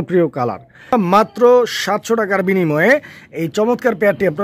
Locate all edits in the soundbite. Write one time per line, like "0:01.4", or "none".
0:00.9